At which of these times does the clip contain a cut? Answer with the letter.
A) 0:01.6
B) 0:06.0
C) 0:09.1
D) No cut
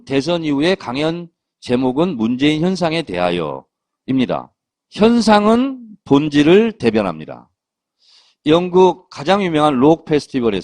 C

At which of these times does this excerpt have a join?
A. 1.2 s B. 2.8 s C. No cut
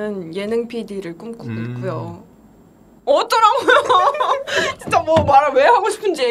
C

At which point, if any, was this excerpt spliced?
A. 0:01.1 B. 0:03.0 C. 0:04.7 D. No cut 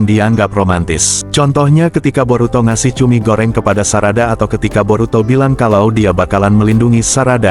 A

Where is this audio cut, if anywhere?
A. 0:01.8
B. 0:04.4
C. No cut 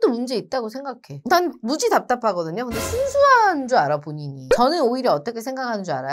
B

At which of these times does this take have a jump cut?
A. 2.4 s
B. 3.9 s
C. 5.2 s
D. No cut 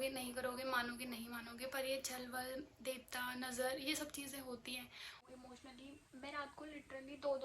C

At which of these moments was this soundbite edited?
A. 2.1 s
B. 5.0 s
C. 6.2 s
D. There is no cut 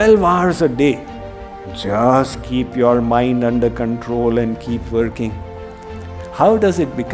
D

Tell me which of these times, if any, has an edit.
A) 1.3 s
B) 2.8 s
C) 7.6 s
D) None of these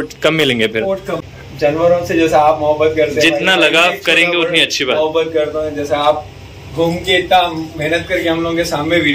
A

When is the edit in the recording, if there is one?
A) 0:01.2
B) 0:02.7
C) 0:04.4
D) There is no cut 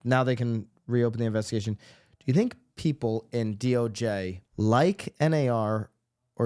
C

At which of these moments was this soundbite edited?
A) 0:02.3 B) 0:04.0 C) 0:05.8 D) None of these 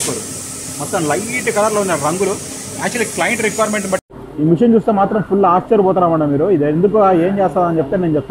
B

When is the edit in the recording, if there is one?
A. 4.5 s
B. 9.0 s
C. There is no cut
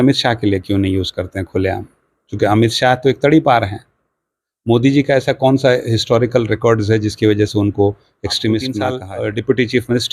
B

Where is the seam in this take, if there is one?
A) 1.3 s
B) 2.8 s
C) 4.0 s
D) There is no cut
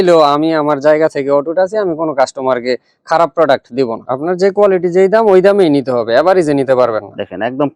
C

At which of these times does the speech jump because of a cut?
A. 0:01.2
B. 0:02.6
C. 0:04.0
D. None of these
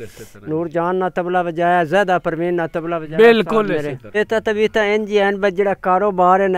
C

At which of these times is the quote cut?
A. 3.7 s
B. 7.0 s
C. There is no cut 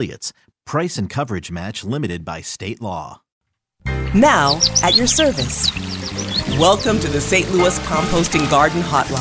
A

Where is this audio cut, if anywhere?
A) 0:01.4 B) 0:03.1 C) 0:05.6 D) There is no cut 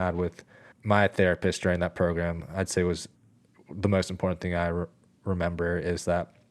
B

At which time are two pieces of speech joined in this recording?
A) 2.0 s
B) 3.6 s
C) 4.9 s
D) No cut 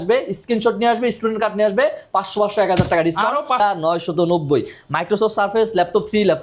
B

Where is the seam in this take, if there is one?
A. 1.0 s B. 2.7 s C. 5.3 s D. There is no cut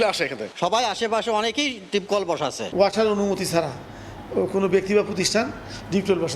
D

